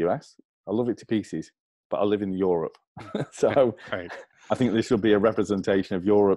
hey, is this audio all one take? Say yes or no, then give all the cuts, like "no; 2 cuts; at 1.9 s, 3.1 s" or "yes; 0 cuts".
yes; 0 cuts